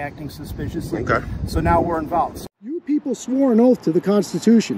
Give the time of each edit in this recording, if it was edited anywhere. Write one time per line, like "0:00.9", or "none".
0:02.8